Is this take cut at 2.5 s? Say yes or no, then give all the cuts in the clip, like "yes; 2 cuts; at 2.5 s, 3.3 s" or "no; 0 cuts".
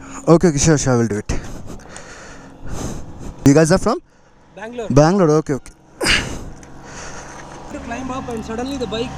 no; 0 cuts